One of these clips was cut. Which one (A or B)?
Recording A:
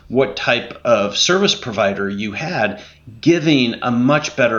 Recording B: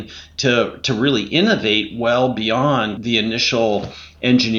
B